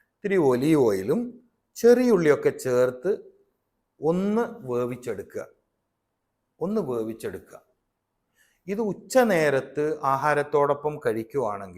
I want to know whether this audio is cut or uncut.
uncut